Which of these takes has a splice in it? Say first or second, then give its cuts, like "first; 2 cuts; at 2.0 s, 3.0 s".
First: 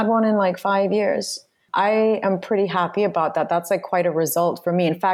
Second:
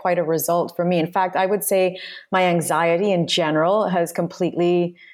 first; 1 cut; at 1.6 s